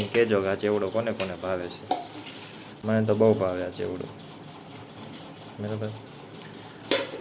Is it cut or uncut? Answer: uncut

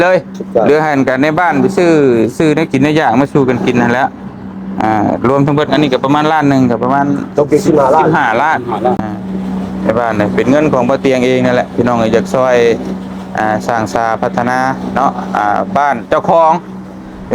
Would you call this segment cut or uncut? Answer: cut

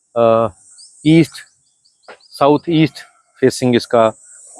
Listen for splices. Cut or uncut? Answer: uncut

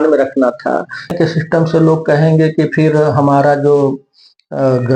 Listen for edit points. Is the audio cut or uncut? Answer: cut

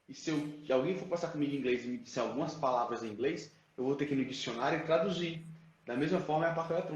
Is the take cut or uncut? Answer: uncut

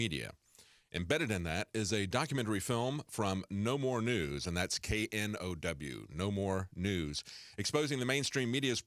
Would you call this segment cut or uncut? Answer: uncut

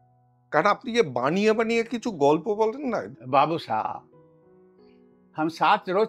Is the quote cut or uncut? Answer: cut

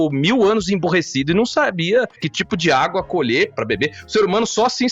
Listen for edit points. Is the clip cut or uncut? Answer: cut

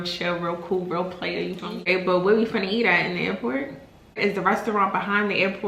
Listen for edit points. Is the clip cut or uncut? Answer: cut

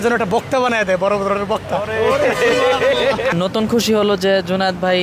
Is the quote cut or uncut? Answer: cut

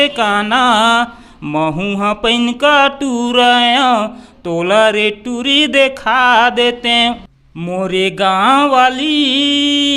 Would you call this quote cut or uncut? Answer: cut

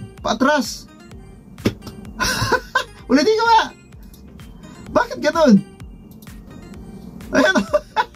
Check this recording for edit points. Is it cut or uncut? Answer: uncut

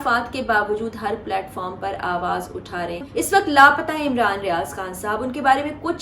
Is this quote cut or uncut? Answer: cut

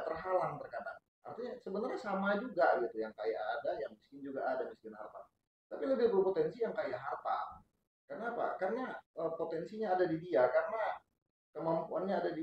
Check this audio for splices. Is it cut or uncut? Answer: uncut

